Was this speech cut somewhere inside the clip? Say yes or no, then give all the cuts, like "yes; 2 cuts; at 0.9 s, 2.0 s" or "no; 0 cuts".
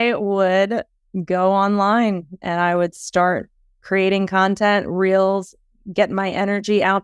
yes; 1 cut; at 3.8 s